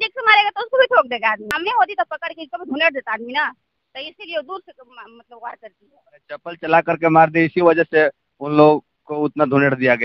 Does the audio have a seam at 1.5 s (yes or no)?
yes